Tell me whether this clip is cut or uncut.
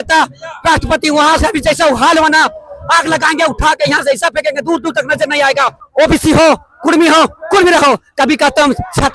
cut